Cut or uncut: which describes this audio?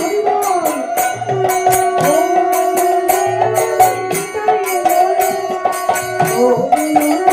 uncut